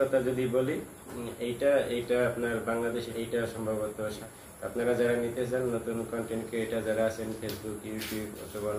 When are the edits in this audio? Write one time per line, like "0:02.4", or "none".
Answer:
0:03.1
0:04.2